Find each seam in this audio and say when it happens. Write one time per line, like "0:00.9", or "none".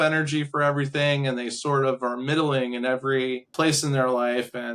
0:03.5